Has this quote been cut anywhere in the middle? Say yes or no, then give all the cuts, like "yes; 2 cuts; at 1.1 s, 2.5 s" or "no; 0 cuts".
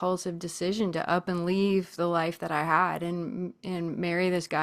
no; 0 cuts